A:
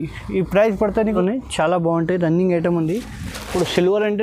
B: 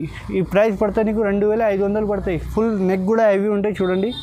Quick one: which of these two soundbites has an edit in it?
A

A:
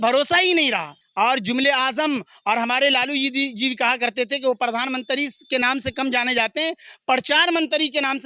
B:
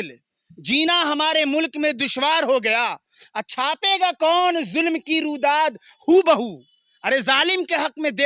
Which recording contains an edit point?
A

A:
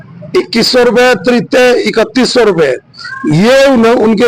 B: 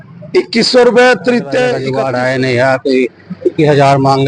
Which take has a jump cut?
B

